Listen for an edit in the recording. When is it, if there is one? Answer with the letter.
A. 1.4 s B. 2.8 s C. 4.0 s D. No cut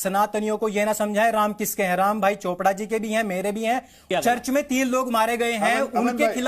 C